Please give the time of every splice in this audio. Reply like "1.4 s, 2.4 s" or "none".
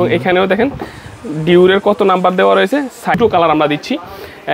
3.2 s